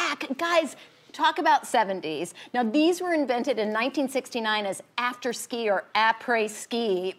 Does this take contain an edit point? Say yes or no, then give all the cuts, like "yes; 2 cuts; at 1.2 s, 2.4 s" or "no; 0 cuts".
yes; 1 cut; at 1.7 s